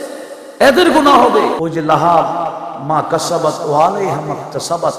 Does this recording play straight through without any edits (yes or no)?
no